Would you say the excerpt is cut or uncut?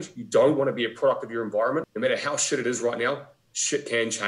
cut